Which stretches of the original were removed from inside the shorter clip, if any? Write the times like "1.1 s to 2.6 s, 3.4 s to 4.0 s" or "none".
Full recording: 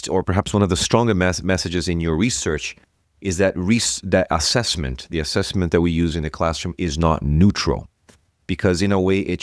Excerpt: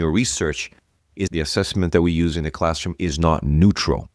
3.3 s to 5.1 s